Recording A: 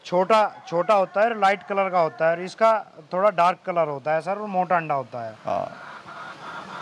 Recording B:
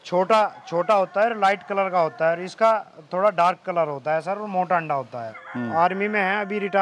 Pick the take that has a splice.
B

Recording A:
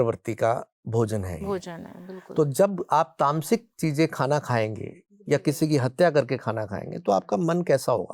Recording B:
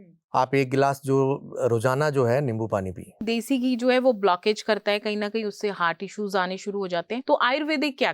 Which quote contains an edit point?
B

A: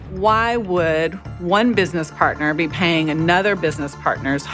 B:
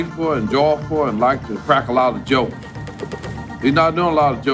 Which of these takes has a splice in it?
B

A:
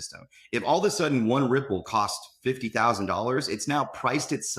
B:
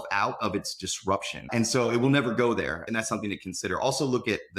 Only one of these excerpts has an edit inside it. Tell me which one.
B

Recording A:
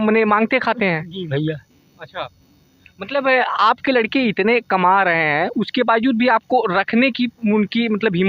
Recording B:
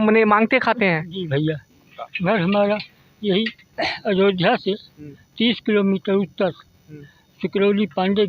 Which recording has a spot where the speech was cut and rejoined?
B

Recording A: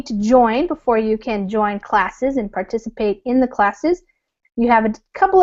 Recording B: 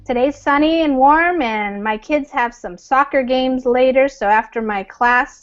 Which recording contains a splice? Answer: B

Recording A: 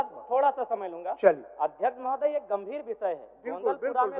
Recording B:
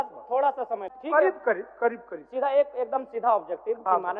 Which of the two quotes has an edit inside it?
B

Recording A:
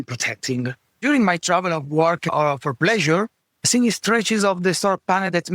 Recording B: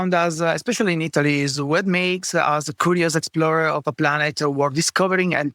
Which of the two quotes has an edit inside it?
A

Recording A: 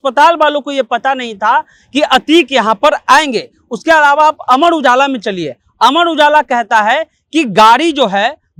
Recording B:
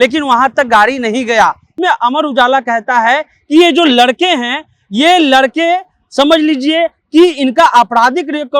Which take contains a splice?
B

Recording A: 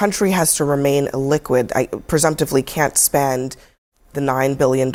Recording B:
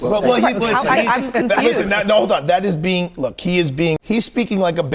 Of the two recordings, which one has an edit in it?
B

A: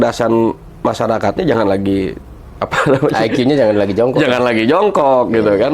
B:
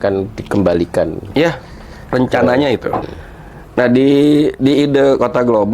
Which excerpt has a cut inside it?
B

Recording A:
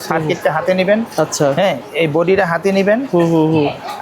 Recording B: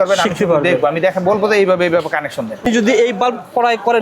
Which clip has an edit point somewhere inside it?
B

